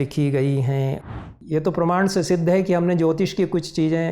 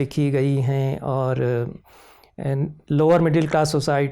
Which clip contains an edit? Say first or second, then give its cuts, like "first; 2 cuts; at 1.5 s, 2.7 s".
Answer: first; 1 cut; at 1.0 s